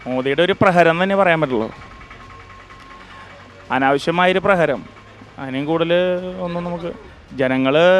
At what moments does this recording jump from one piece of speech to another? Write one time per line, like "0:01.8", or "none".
none